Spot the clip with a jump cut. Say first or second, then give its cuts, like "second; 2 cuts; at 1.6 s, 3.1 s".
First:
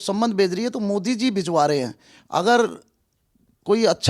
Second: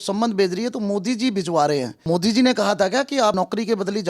second; 1 cut; at 1.9 s